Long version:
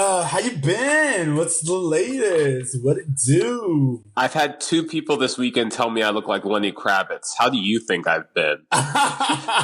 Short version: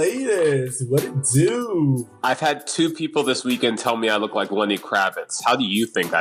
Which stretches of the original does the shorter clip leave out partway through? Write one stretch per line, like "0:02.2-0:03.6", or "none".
none